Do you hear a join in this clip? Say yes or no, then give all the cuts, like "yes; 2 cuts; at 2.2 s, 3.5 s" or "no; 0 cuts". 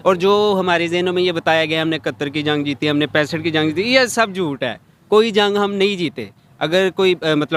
no; 0 cuts